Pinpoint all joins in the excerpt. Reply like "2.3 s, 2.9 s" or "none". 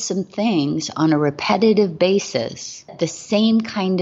2.9 s